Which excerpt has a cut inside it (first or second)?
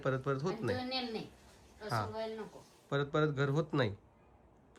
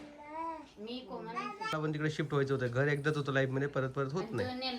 second